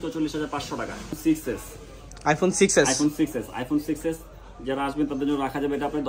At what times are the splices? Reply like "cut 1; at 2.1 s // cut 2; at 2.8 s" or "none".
cut 1; at 1.2 s